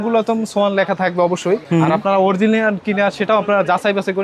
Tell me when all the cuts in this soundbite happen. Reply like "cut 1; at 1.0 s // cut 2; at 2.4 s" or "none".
none

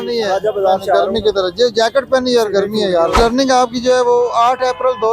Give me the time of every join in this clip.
cut 1; at 3.2 s

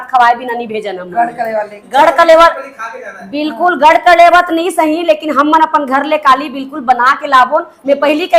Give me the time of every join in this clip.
none

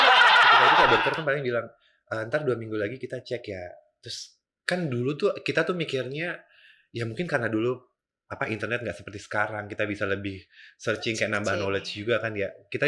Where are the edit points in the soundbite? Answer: cut 1; at 0.9 s

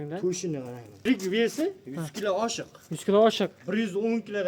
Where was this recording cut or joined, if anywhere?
cut 1; at 1.0 s

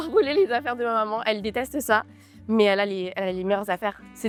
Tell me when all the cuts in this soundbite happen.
none

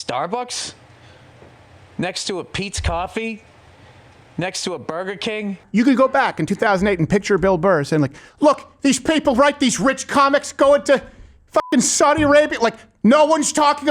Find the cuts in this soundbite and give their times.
cut 1; at 5.6 s

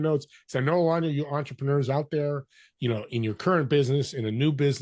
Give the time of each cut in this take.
none

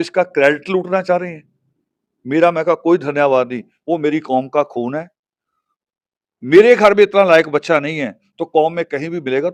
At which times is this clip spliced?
none

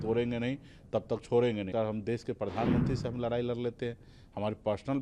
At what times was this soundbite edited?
cut 1; at 1.7 s

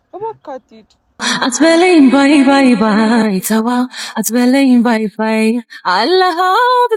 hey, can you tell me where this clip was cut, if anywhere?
none

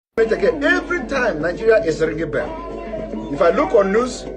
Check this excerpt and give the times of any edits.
cut 1; at 1.0 s

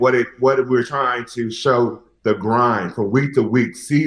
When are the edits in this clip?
cut 1; at 2.1 s

